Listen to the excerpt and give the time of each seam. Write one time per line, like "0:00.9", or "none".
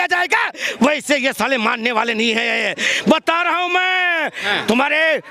none